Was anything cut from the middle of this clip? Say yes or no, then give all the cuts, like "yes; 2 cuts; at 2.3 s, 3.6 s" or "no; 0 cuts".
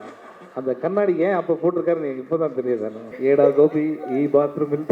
yes; 1 cut; at 3.1 s